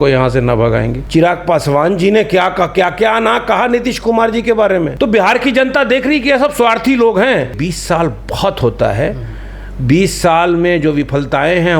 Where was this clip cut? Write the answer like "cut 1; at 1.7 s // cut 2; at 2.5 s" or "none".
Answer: cut 1; at 1.0 s // cut 2; at 4.9 s // cut 3; at 7.7 s